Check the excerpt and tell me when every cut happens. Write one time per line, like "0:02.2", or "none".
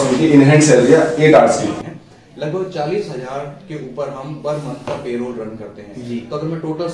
0:01.8